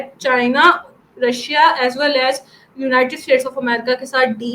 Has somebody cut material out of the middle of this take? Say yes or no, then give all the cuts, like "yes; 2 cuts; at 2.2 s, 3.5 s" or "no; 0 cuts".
no; 0 cuts